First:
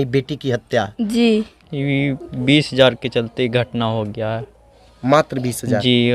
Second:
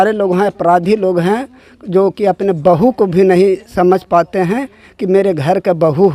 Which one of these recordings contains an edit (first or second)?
first